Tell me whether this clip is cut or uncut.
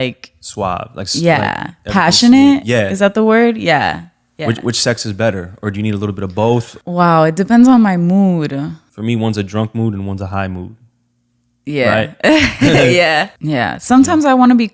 cut